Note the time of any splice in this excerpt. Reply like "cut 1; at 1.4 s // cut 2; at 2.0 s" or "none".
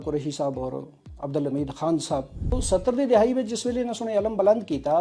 cut 1; at 2.5 s